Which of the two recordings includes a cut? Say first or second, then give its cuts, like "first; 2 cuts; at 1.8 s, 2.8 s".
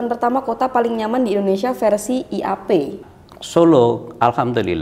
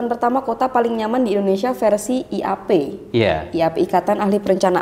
first; 1 cut; at 3.0 s